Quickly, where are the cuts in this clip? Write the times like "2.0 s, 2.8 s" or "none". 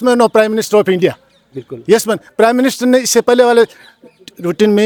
none